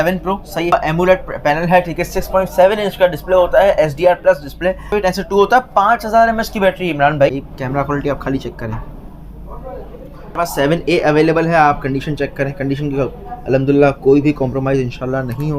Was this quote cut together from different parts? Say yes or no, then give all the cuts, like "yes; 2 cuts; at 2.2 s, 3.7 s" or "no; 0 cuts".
yes; 4 cuts; at 0.7 s, 4.9 s, 7.3 s, 10.4 s